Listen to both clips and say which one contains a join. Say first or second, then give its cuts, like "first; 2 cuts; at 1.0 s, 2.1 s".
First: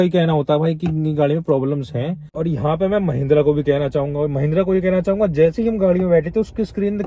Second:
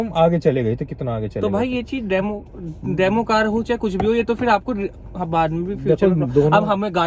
first; 1 cut; at 2.3 s